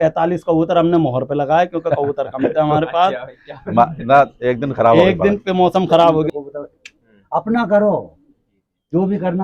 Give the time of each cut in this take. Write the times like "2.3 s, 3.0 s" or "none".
6.3 s